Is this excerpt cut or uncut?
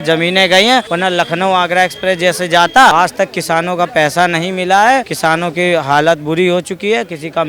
cut